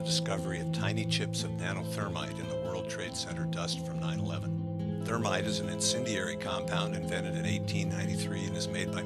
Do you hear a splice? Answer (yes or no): no